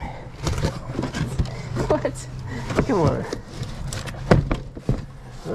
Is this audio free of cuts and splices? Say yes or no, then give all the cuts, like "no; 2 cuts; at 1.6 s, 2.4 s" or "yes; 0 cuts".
yes; 0 cuts